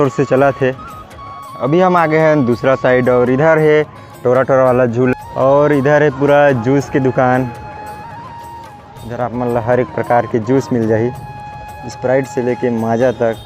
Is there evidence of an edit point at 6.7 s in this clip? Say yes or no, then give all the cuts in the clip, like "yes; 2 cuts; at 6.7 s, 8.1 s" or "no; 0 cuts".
no; 2 cuts; at 1.5 s, 5.1 s